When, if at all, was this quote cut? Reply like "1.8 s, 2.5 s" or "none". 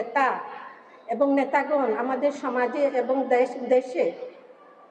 none